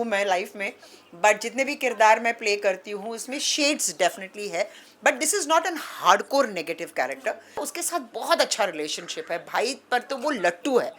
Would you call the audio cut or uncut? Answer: cut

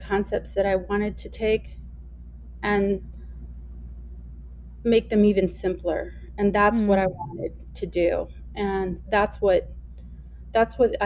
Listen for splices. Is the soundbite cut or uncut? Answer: uncut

